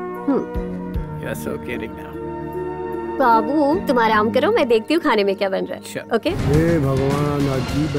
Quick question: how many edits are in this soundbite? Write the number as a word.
one